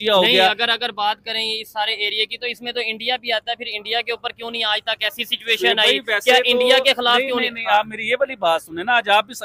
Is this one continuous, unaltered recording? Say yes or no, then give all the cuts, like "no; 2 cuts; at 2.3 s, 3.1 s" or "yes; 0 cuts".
yes; 0 cuts